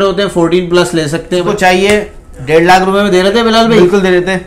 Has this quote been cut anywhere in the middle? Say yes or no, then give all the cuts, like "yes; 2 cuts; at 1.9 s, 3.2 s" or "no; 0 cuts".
yes; 1 cut; at 1.4 s